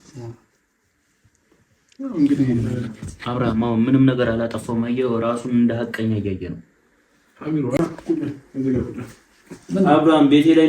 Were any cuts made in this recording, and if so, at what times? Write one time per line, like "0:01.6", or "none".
0:07.8